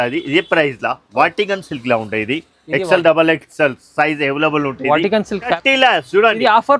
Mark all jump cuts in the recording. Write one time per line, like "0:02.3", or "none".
0:05.6

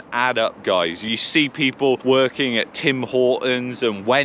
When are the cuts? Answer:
0:01.1

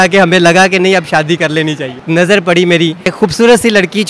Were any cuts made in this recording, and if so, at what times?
0:02.0
0:03.1

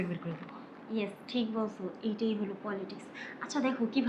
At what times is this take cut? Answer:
none

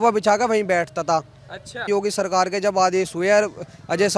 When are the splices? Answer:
0:01.9

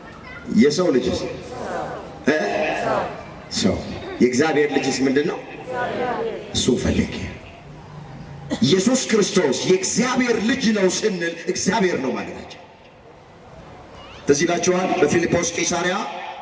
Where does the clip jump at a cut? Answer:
0:13.6

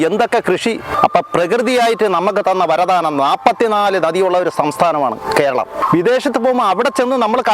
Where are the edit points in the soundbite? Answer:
0:00.9
0:05.8

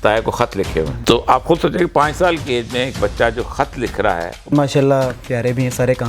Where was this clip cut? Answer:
0:00.9
0:04.5

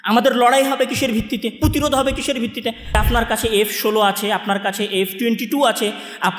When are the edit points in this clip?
0:03.0

